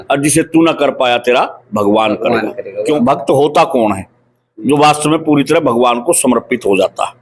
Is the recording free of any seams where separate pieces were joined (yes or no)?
no